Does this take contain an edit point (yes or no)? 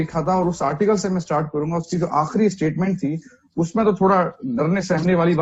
no